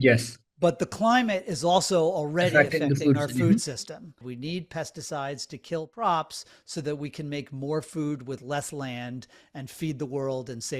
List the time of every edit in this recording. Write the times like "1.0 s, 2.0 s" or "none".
4.2 s